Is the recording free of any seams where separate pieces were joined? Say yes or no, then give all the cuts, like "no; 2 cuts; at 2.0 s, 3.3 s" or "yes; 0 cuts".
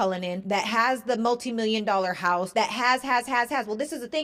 yes; 0 cuts